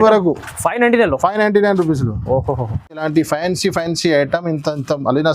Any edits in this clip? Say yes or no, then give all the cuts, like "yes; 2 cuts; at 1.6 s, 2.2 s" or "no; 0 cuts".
yes; 1 cut; at 3.0 s